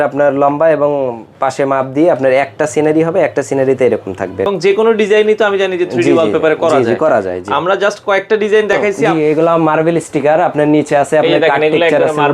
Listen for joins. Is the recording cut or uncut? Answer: cut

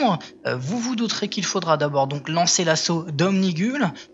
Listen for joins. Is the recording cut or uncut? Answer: uncut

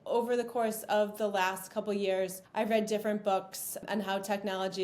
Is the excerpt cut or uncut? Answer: cut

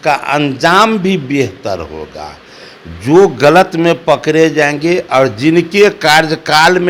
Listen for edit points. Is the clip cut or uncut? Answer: uncut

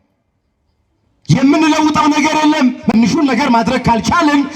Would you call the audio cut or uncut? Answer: cut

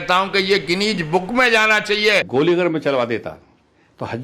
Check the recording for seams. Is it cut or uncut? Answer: cut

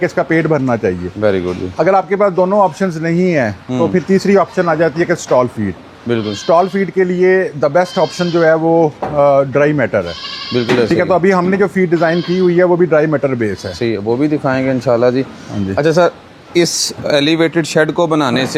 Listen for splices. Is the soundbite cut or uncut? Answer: uncut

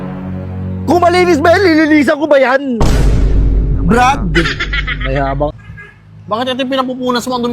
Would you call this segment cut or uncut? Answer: cut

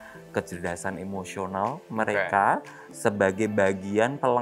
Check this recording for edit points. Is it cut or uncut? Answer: uncut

